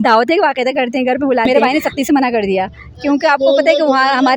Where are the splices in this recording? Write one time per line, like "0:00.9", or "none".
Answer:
0:01.5